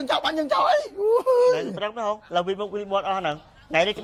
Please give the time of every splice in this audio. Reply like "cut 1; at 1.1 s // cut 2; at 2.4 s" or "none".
none